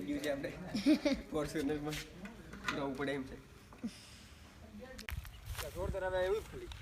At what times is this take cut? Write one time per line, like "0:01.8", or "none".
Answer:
0:05.1